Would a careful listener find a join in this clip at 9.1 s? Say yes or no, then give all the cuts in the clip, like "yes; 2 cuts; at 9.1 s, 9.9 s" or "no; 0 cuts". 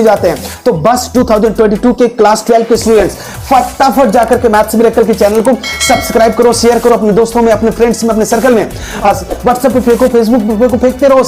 yes; 1 cut; at 9.1 s